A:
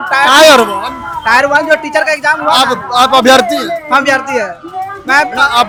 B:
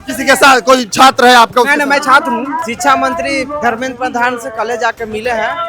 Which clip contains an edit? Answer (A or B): B